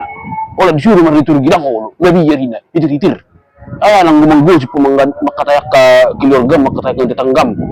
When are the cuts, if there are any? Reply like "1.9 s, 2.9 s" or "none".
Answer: none